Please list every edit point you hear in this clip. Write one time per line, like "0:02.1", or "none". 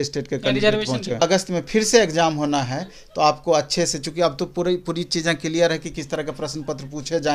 0:01.2